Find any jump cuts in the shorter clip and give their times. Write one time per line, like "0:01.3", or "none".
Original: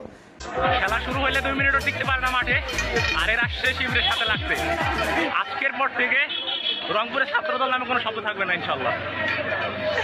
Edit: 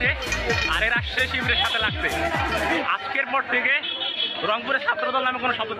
none